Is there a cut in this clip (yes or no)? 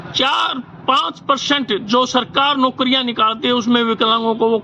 no